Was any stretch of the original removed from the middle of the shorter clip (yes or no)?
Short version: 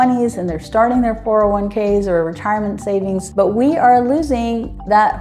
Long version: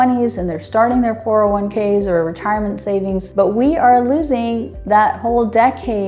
no